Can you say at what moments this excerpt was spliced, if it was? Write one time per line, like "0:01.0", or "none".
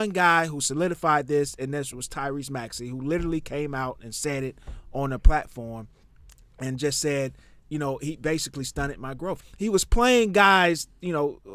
0:09.4